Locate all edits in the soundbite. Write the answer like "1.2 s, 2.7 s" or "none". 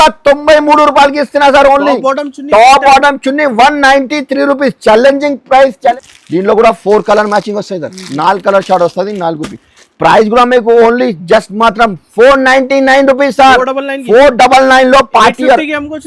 5.9 s